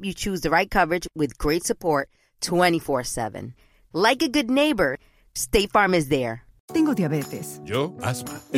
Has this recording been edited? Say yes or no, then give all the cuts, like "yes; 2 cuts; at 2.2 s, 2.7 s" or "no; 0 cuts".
yes; 1 cut; at 6.6 s